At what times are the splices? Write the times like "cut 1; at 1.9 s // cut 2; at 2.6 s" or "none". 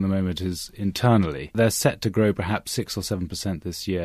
cut 1; at 1.5 s